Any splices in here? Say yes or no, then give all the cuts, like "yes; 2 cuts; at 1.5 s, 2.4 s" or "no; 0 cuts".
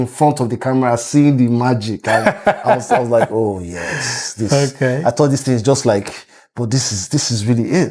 no; 0 cuts